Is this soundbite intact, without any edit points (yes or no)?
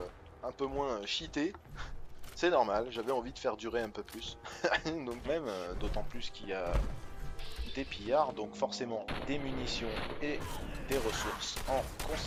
yes